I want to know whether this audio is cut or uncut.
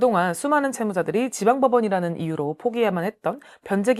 uncut